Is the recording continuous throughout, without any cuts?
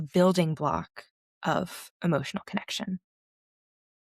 yes; 0 cuts

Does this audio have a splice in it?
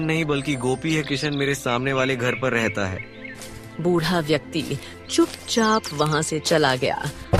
no; 0 cuts

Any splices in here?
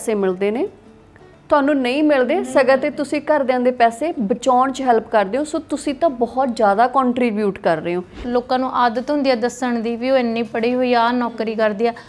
yes; 1 cut; at 8.2 s

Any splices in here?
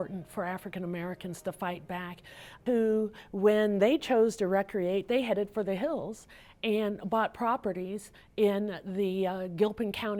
no; 0 cuts

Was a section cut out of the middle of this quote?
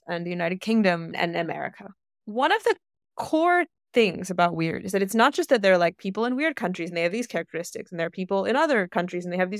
yes; 1 cut; at 1.1 s

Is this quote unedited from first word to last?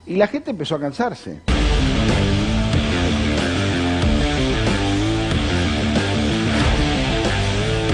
yes; 0 cuts

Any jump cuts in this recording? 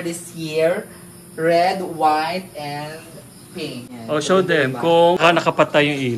yes; 2 cuts; at 3.9 s, 5.2 s

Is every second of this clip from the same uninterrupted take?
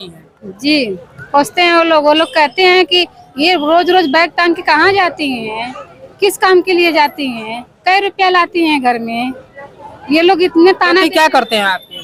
yes; 0 cuts

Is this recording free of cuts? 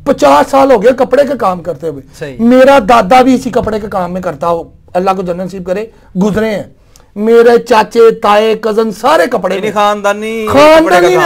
yes; 0 cuts

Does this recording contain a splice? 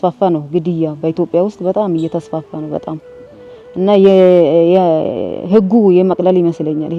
no; 0 cuts

